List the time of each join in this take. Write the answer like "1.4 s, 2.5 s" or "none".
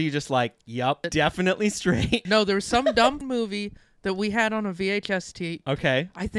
1.0 s, 2.2 s, 3.2 s